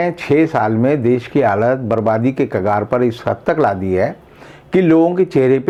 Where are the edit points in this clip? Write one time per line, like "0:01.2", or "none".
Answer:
none